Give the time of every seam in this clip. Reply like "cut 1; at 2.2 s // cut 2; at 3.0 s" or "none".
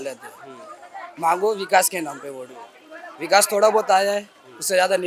none